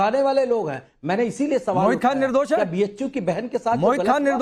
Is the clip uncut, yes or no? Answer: yes